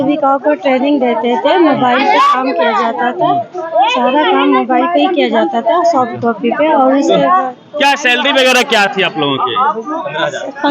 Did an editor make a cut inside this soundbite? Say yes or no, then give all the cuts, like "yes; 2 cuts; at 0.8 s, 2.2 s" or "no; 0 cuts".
no; 0 cuts